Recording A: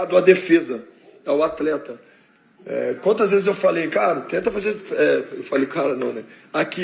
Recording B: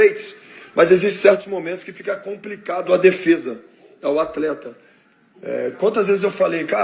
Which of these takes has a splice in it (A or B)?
A